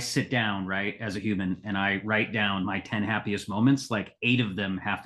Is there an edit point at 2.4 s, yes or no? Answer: yes